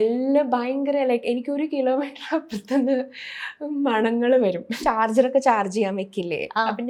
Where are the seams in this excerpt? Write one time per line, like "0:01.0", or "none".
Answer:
0:04.7